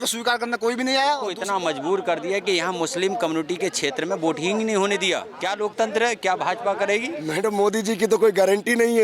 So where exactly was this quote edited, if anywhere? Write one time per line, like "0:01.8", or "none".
0:01.4
0:05.3
0:07.2